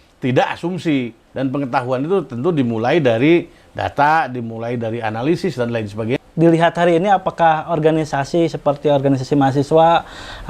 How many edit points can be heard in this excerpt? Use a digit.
1